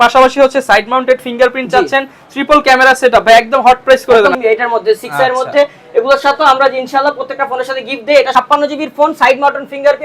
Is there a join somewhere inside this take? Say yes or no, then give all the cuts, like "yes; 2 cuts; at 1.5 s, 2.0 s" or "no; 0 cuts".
yes; 2 cuts; at 4.3 s, 8.3 s